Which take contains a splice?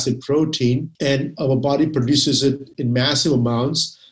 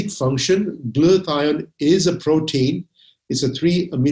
first; 2 cuts; at 0.9 s, 2.7 s

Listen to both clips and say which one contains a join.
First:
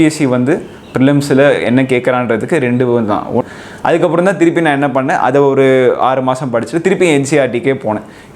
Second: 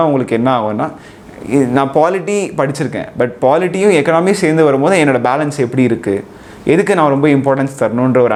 first; 1 cut; at 3.4 s

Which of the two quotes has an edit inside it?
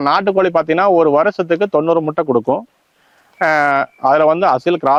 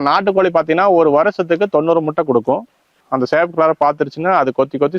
second; 1 cut; at 3.0 s

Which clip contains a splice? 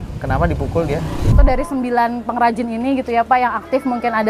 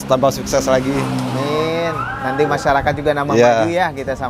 first; 1 cut; at 1.4 s

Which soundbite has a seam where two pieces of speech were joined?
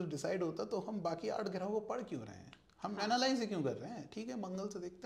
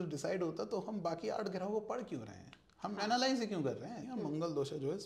second; 1 cut; at 4.0 s

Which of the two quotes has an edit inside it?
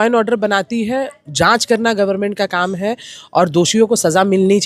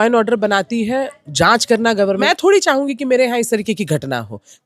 second; 1 cut; at 2.2 s

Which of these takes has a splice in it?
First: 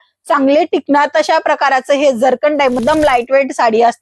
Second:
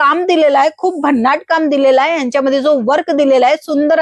first; 1 cut; at 2.8 s

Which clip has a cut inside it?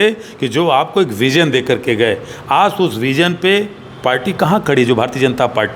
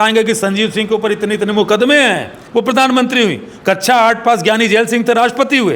second; 1 cut; at 2.3 s

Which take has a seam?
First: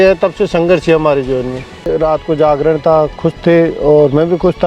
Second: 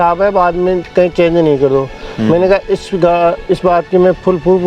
first; 1 cut; at 1.9 s

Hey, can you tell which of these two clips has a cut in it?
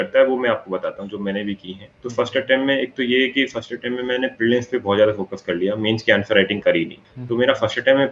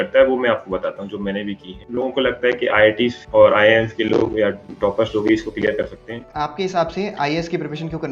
second; 2 cuts; at 1.8 s, 6.3 s

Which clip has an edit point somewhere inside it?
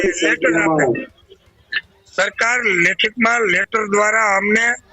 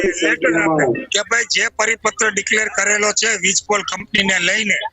second; 1 cut; at 1.1 s

